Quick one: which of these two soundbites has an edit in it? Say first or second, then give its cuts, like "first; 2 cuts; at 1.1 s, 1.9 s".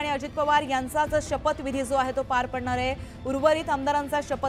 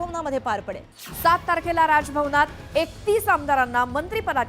second; 1 cut; at 0.9 s